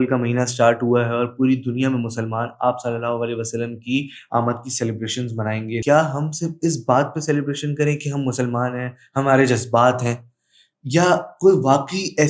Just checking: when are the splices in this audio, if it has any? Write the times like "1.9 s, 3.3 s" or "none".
5.8 s